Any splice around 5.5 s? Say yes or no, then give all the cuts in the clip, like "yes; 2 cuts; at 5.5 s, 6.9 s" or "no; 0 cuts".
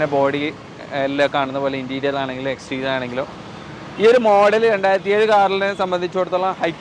no; 0 cuts